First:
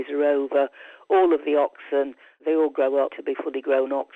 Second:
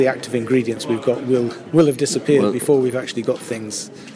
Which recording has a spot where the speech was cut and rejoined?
first; 2 cuts; at 2.4 s, 3.2 s

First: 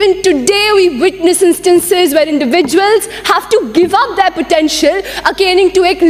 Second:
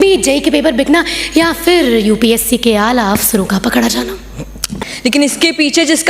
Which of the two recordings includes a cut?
second; 1 cut; at 4.7 s

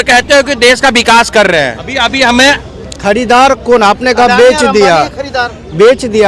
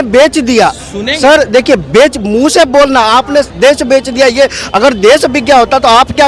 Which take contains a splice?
first; 1 cut; at 1.8 s

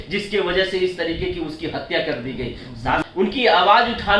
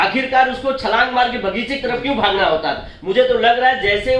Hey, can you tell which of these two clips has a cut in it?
first; 1 cut; at 3.0 s

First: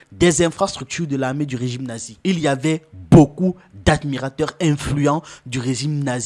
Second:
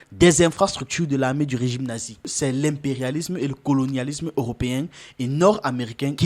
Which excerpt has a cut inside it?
second; 1 cut; at 2.2 s

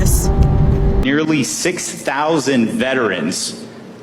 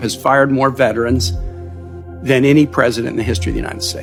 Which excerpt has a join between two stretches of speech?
first; 1 cut; at 1.0 s

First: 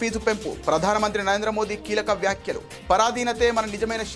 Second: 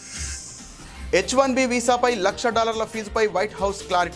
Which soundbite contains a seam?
second; 1 cut; at 1.1 s

